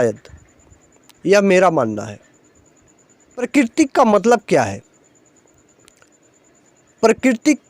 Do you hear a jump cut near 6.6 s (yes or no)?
no